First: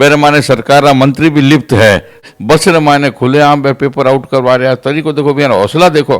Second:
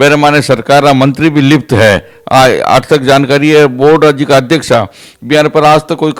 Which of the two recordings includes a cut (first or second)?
first